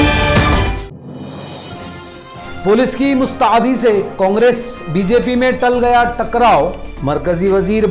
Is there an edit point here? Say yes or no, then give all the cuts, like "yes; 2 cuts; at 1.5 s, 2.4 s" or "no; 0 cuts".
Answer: yes; 2 cuts; at 1.1 s, 1.7 s